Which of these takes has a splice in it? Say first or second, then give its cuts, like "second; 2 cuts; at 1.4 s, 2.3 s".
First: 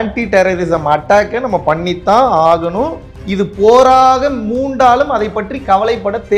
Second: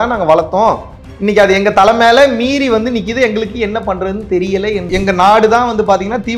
second; 1 cut; at 4.8 s